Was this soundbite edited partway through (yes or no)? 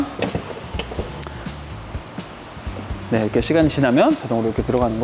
no